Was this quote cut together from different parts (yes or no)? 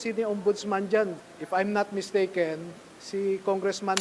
yes